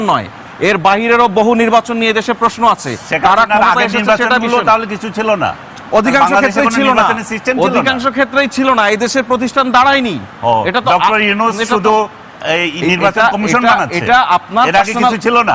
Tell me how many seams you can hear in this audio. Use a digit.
0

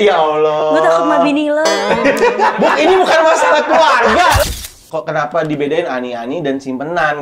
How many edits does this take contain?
1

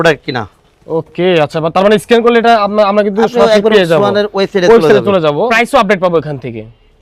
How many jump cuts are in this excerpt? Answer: 1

